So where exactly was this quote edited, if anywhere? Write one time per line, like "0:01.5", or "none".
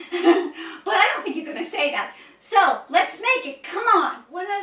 none